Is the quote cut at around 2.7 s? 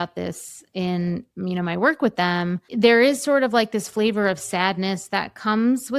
yes; 1 cut; at 2.7 s

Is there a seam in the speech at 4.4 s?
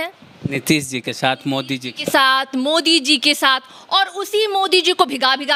no; 0 cuts

